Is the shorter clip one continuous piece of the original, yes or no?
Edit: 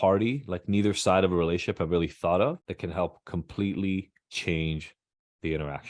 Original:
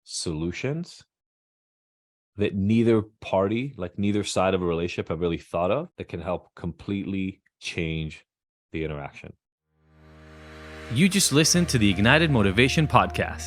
yes